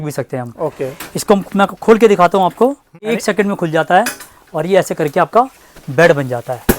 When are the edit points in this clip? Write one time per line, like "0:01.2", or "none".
0:03.1